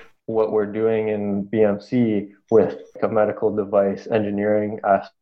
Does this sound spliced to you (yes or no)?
yes